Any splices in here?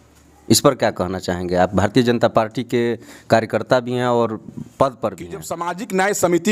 yes; 1 cut; at 5.5 s

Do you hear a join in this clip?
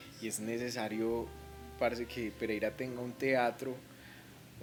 no; 0 cuts

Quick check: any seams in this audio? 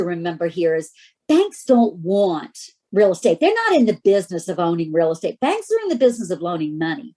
no; 0 cuts

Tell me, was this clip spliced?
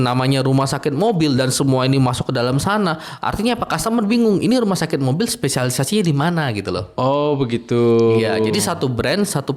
no; 0 cuts

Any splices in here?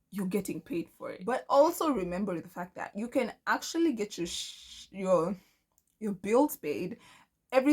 yes; 1 cut; at 1.2 s

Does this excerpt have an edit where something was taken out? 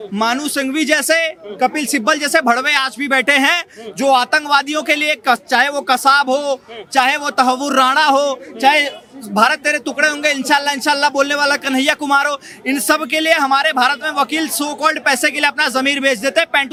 no; 0 cuts

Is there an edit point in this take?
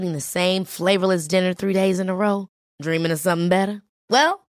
no; 0 cuts

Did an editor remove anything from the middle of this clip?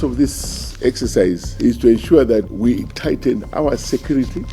yes; 2 cuts; at 1.5 s, 2.5 s

